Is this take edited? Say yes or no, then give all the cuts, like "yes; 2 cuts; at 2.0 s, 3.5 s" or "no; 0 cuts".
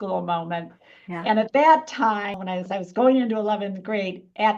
no; 0 cuts